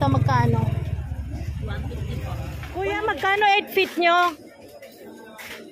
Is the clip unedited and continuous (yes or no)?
no